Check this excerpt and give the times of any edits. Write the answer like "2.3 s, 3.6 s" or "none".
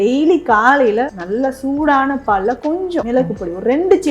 1.2 s, 3.1 s